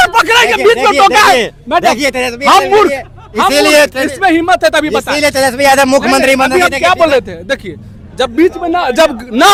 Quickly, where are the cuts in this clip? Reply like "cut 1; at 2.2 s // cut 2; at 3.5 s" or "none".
none